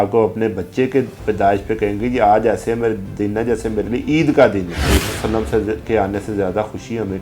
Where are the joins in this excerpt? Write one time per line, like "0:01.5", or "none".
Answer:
0:04.8